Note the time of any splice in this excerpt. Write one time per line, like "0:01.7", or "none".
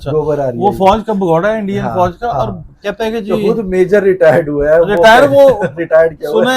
none